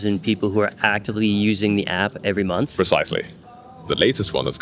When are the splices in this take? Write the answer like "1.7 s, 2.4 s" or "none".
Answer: 2.7 s, 3.8 s